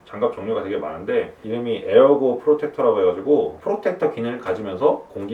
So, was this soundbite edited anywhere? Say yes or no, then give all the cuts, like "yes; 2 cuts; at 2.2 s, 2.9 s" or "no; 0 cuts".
yes; 1 cut; at 1.4 s